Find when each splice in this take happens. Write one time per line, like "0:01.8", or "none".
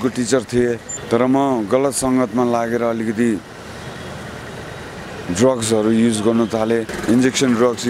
0:00.9
0:06.9